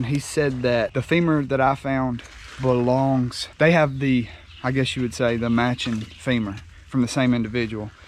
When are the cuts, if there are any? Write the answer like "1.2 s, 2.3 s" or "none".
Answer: 0.9 s, 3.4 s